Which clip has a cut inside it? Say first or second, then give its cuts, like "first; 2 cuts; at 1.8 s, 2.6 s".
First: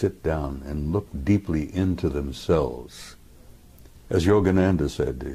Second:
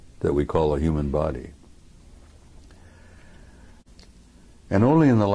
second; 1 cut; at 3.7 s